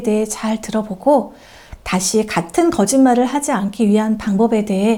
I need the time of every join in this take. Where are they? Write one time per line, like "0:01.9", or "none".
none